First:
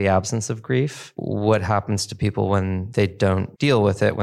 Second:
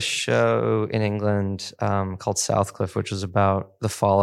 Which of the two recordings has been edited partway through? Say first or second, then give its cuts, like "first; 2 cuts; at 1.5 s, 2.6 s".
first; 2 cuts; at 1.1 s, 3.2 s